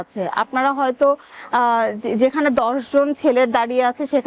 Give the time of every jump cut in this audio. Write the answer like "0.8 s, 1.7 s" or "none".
none